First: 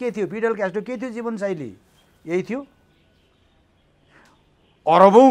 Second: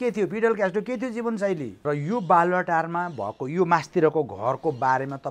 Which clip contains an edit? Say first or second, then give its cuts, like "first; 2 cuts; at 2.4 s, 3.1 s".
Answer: second; 1 cut; at 1.7 s